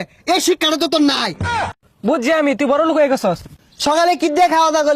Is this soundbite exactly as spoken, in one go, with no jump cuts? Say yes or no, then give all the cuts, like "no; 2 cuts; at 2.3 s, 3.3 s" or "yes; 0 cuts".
no; 2 cuts; at 1.7 s, 3.5 s